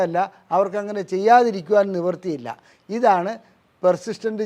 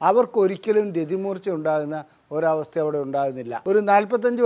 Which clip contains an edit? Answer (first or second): second